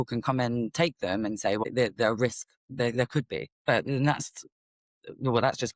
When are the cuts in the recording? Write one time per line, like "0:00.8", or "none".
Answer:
0:01.6
0:03.5